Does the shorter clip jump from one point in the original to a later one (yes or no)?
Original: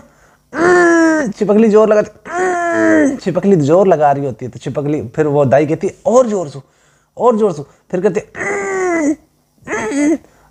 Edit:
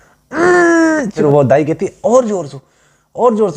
yes